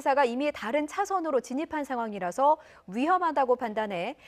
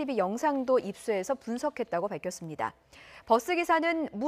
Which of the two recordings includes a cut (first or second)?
first